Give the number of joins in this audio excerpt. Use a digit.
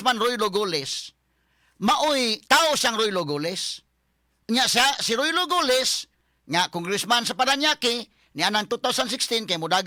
0